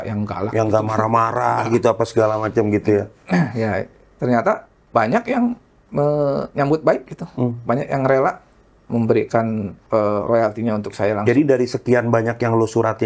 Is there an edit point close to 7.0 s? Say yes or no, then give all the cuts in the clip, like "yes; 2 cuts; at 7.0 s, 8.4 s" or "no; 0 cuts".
no; 3 cuts; at 4.0 s, 4.7 s, 9.8 s